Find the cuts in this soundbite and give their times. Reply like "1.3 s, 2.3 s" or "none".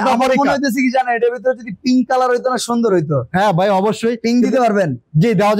none